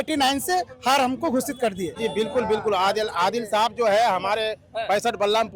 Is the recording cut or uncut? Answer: cut